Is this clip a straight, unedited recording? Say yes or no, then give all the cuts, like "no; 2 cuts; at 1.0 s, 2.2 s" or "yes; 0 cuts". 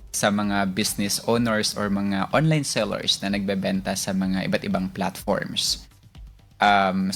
yes; 0 cuts